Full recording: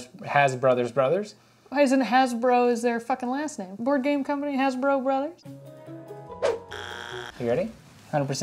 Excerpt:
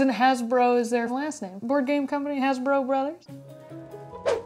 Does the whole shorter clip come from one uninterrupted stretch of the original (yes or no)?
no